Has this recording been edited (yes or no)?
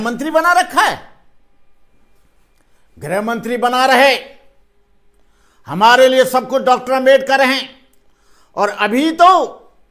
no